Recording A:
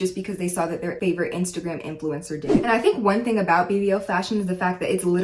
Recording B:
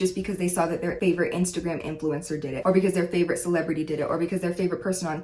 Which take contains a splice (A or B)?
A